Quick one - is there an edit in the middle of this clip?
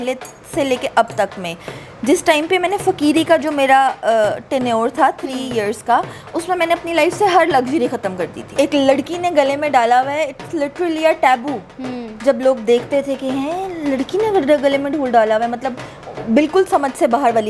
yes; 1 cut; at 8.6 s

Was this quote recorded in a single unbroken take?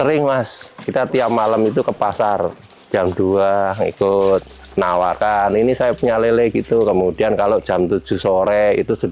yes; 0 cuts

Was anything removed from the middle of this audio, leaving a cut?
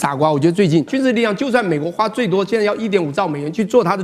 yes; 1 cut; at 0.9 s

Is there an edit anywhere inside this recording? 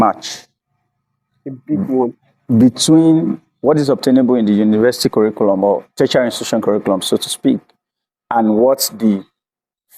no; 0 cuts

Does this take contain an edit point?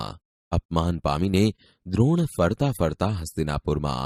no; 0 cuts

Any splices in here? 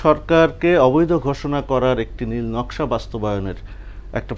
no; 0 cuts

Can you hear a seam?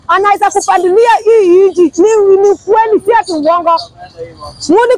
no; 0 cuts

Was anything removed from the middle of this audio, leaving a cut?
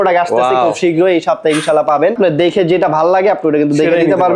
yes; 1 cut; at 2.2 s

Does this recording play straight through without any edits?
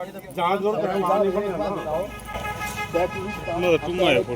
yes; 0 cuts

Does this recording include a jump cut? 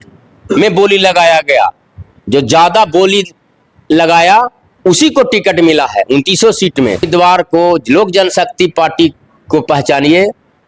yes; 1 cut; at 7.1 s

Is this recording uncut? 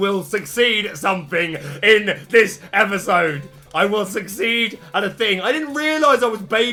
yes; 0 cuts

